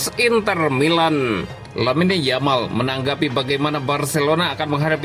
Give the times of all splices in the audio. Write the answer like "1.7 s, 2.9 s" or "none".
1.6 s